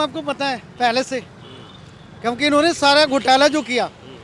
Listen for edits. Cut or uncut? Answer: uncut